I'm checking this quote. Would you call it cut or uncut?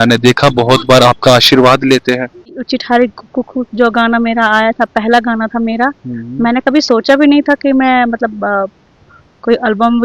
cut